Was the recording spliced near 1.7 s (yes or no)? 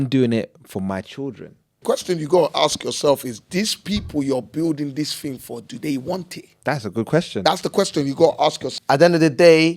yes